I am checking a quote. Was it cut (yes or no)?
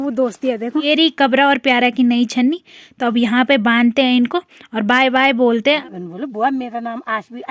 yes